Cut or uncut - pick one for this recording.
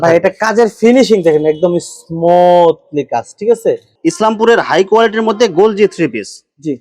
cut